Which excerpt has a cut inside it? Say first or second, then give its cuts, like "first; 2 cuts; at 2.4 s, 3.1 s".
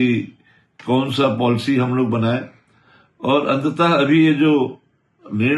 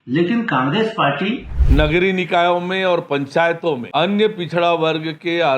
second; 2 cuts; at 1.5 s, 3.8 s